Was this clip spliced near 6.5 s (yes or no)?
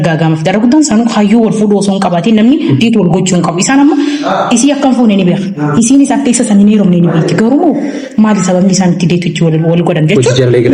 no